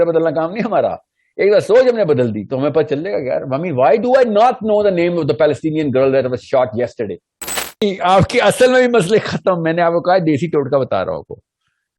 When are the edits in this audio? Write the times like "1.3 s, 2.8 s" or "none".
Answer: 7.8 s

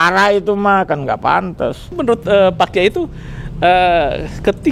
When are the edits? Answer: 2.0 s

